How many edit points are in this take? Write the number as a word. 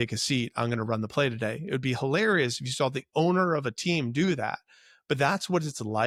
zero